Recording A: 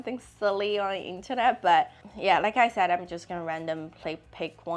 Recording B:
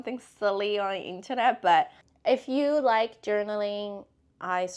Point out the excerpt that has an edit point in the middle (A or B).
B